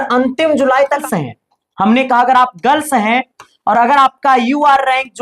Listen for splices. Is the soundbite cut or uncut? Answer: cut